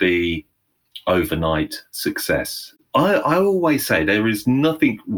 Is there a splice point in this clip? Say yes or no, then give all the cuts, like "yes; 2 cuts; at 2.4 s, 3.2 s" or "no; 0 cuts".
yes; 1 cut; at 2.8 s